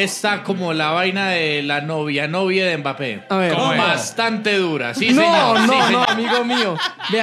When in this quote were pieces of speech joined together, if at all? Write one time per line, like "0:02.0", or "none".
none